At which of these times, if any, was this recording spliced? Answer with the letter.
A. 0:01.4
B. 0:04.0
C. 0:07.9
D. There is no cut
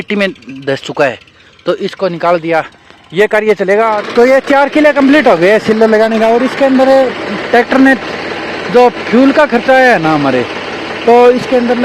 B